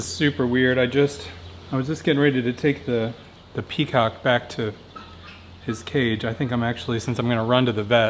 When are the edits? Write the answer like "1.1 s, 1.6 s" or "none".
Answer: none

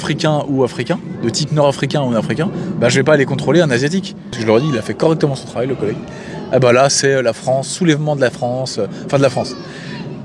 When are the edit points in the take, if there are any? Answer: 4.3 s

